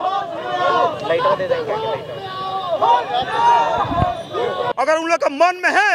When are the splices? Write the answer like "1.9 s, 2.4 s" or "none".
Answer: 4.7 s